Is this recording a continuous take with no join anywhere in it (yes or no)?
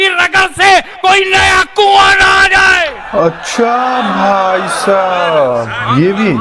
yes